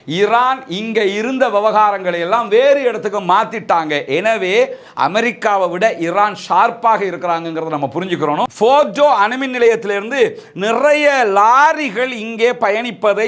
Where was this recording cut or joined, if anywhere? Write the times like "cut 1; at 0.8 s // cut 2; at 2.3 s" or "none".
cut 1; at 8.5 s